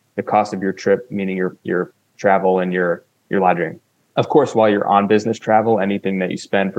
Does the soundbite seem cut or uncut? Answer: uncut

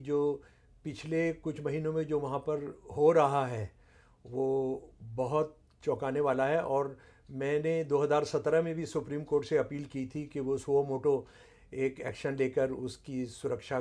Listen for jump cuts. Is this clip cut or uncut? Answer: uncut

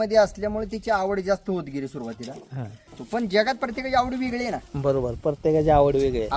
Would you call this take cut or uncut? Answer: cut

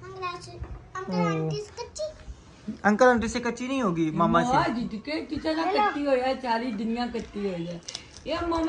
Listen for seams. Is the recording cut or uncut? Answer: uncut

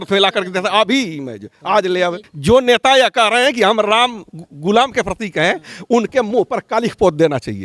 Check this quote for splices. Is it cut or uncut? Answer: cut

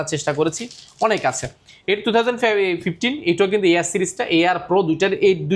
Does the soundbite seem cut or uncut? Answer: uncut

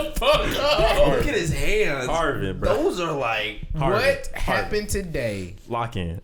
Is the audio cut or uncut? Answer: uncut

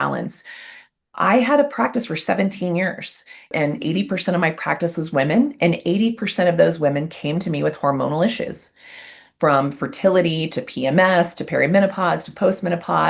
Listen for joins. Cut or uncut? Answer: cut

